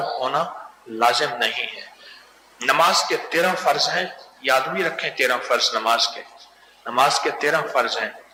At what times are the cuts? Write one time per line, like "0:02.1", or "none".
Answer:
none